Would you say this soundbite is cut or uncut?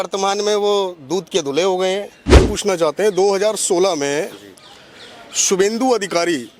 cut